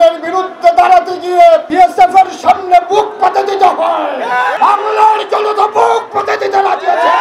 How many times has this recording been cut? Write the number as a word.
two